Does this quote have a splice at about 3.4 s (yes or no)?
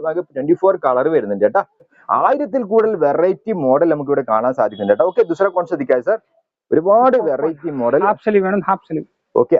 no